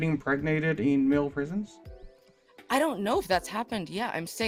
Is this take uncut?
yes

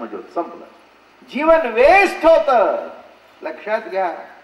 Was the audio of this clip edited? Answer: yes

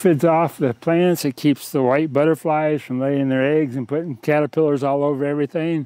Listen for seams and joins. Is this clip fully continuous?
yes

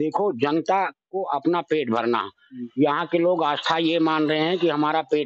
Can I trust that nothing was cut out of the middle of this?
yes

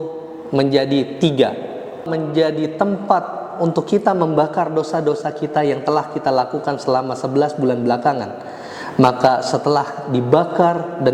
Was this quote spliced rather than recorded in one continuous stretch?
yes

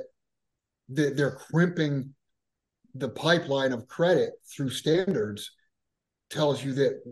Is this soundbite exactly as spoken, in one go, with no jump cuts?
no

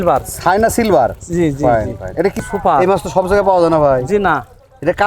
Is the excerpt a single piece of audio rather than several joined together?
no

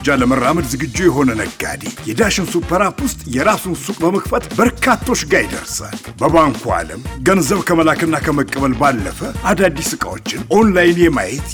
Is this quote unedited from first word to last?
yes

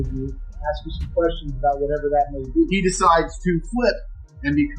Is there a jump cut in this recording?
yes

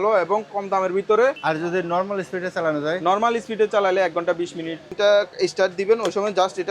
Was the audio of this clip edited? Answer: yes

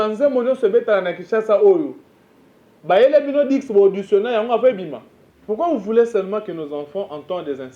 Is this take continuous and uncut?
no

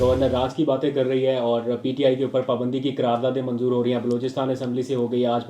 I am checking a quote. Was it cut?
no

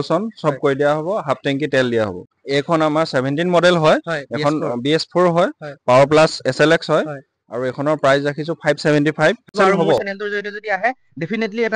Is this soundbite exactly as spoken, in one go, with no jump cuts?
no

